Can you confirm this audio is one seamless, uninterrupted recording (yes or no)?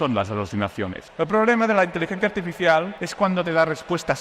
no